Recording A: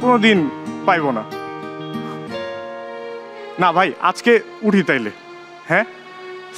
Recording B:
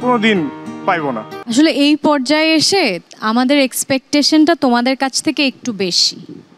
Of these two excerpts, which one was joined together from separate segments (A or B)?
B